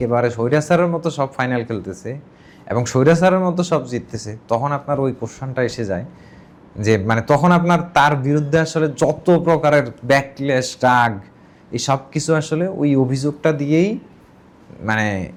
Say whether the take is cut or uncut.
uncut